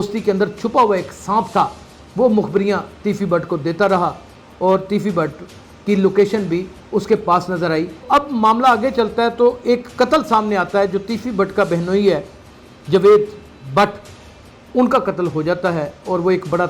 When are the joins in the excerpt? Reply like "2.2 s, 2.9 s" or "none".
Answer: 8.0 s

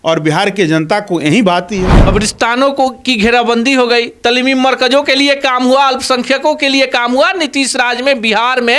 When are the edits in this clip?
2.0 s

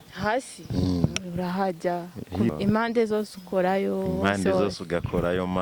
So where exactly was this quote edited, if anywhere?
2.5 s

